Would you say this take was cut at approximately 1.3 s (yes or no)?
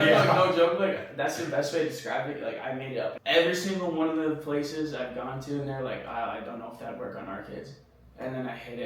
no